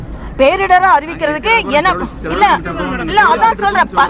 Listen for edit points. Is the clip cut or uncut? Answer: uncut